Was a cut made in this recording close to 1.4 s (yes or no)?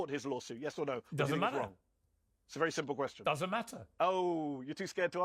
no